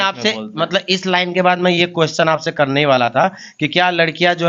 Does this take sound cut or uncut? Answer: uncut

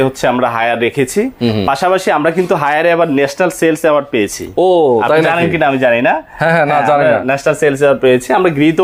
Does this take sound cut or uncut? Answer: uncut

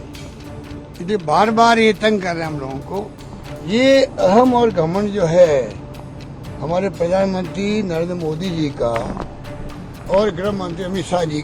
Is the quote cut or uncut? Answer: cut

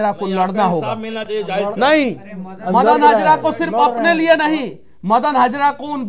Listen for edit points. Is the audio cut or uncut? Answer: uncut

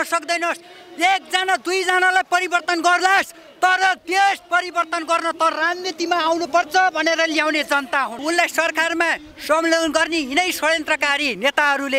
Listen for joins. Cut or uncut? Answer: cut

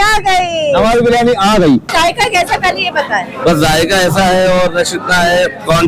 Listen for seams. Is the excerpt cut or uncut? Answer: cut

